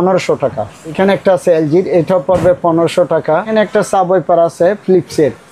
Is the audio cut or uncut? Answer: cut